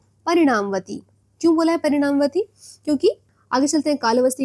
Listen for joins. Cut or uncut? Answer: cut